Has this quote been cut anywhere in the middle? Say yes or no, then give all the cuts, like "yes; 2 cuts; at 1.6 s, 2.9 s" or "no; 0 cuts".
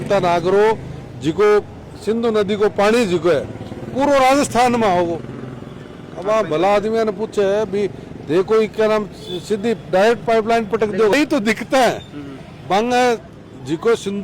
no; 0 cuts